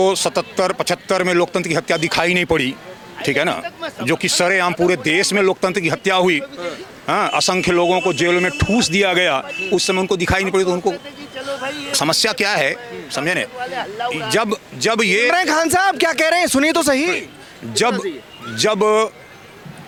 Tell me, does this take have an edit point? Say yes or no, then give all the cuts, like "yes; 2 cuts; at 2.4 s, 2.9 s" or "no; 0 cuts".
no; 0 cuts